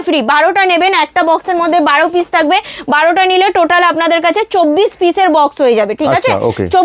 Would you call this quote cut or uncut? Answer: uncut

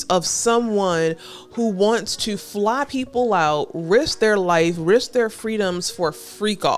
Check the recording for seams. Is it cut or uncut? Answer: uncut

